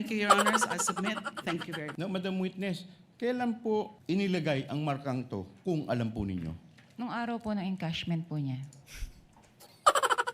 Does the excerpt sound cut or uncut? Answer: cut